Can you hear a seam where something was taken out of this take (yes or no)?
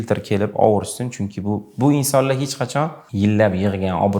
yes